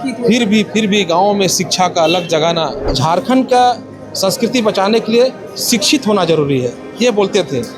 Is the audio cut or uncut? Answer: cut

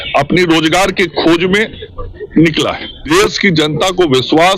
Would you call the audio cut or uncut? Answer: cut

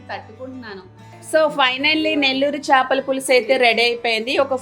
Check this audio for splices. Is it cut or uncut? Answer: cut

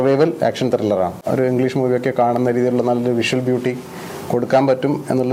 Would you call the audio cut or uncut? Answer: cut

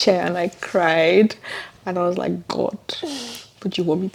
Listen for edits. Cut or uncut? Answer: uncut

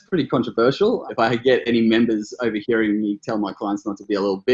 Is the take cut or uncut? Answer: cut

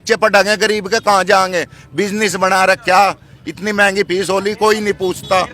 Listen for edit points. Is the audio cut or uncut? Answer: uncut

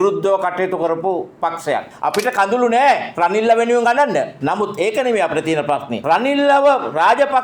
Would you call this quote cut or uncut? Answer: cut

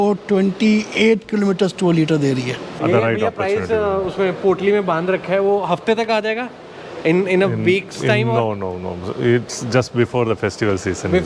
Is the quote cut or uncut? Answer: cut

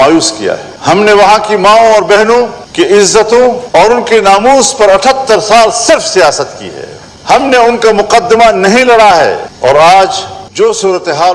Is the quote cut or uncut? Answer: uncut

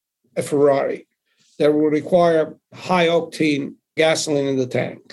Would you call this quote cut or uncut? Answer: cut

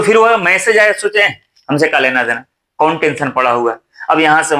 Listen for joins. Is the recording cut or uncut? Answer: uncut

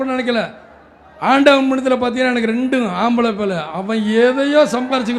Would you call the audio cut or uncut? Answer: uncut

